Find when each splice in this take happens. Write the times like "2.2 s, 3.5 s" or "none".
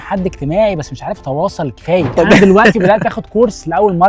2.1 s